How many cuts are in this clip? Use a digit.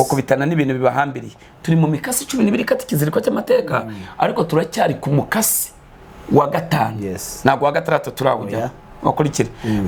0